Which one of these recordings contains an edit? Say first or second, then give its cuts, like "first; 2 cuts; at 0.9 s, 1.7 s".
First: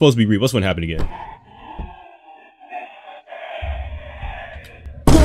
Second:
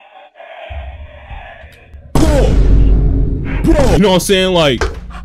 second; 1 cut; at 4.0 s